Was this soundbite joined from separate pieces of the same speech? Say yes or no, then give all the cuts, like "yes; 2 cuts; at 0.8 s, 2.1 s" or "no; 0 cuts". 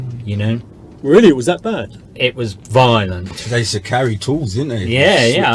yes; 1 cut; at 3.3 s